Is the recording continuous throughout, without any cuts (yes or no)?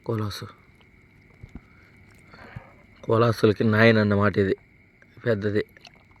yes